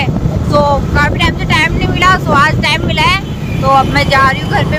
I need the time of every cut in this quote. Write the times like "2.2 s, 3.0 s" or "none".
none